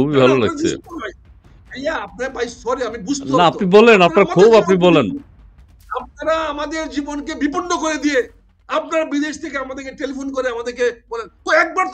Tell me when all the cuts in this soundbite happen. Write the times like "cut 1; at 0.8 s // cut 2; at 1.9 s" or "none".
none